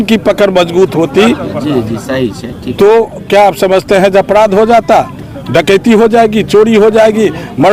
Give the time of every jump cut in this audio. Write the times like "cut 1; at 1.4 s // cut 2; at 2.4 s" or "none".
none